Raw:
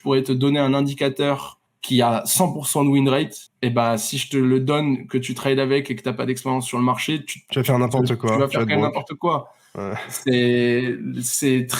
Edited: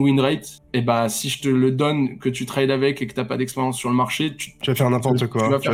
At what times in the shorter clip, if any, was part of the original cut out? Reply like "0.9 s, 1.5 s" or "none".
none